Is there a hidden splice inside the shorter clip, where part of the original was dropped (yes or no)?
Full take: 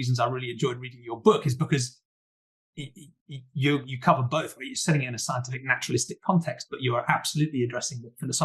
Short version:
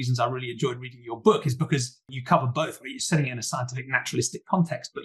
yes